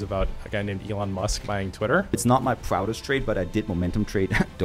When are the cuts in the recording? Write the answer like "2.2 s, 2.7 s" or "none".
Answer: 2.2 s